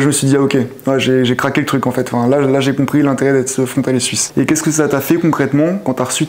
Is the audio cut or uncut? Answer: cut